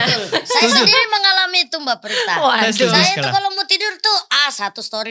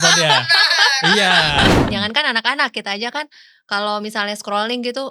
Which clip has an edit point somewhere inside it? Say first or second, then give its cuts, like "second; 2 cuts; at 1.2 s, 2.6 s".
second; 1 cut; at 1.9 s